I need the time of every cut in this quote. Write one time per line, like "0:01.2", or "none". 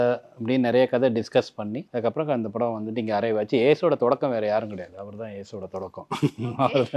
0:01.8